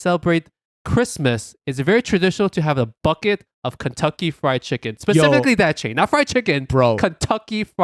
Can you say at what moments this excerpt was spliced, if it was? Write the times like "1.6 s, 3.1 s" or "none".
none